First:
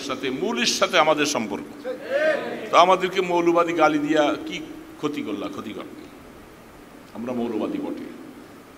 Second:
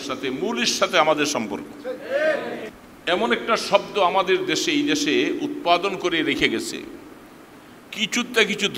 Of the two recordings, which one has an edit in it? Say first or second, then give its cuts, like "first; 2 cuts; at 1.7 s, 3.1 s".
second; 1 cut; at 2.6 s